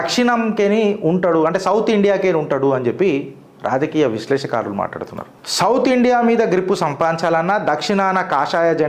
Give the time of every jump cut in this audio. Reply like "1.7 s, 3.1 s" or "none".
none